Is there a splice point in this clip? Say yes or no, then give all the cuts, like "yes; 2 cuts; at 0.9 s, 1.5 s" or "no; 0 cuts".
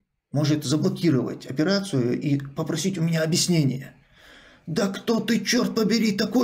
no; 0 cuts